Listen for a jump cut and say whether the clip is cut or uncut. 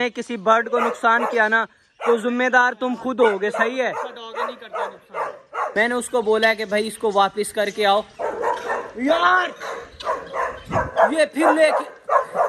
cut